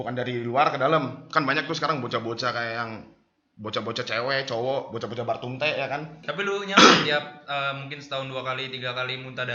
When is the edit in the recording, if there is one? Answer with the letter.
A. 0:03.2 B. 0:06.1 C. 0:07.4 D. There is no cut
B